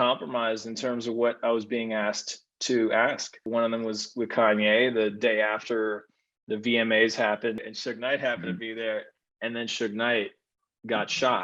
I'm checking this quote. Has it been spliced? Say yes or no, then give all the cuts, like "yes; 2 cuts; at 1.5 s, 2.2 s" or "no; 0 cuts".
yes; 2 cuts; at 3.5 s, 7.6 s